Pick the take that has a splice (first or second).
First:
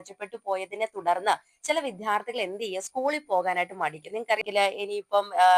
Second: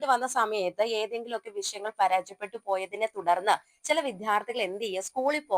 first